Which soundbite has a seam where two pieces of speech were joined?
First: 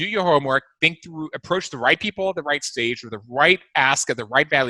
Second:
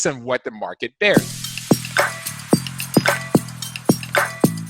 second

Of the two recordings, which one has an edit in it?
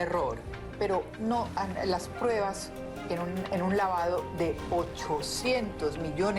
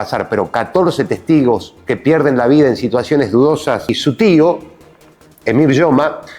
second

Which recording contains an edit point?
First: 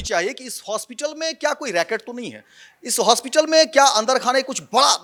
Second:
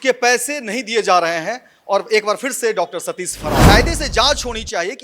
second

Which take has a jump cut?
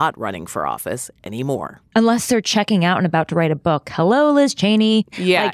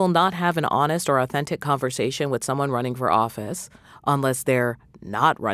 first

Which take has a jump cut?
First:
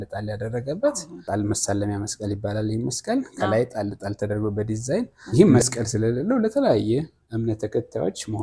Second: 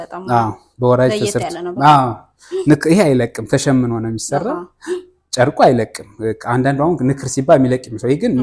first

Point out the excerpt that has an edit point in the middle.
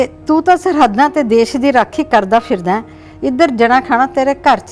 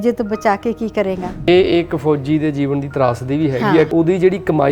second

